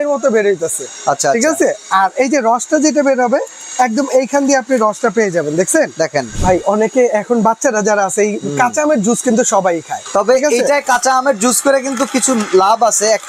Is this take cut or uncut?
cut